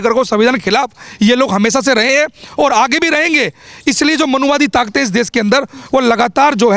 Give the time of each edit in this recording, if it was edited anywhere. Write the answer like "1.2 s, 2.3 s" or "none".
none